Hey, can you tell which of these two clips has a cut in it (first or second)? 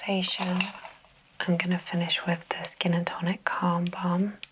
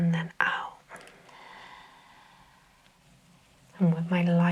second